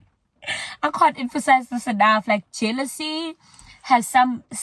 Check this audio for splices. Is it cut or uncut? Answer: uncut